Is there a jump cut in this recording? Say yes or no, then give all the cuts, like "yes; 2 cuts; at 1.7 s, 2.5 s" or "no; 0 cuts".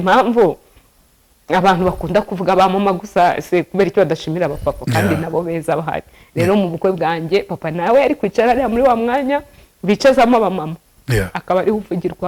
no; 0 cuts